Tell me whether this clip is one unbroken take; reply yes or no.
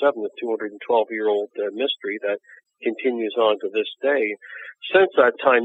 yes